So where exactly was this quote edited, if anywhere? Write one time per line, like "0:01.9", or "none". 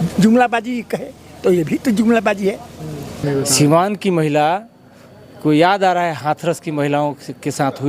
0:03.2